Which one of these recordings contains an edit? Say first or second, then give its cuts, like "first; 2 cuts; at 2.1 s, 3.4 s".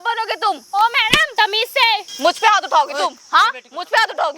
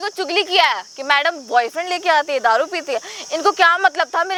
first; 2 cuts; at 1.3 s, 2.1 s